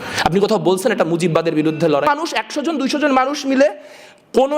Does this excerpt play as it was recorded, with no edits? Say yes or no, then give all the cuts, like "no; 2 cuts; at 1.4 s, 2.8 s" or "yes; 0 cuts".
no; 1 cut; at 2.1 s